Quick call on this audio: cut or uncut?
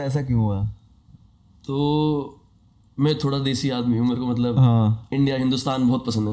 uncut